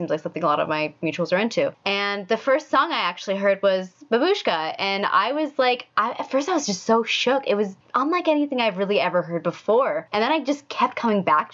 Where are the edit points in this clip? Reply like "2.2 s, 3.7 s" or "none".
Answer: 1.8 s, 7.8 s, 10.0 s